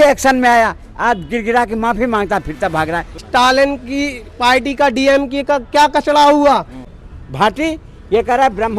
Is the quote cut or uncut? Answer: cut